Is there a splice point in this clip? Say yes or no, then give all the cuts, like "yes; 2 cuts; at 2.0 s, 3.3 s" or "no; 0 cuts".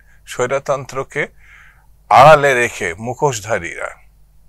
no; 0 cuts